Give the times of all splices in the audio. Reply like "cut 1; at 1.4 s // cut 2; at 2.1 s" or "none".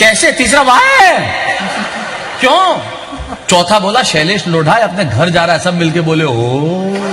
none